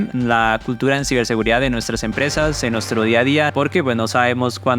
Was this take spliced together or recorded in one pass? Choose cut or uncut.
cut